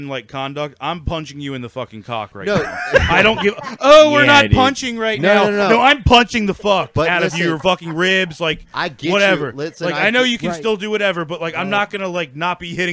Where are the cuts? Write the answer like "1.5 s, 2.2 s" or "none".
none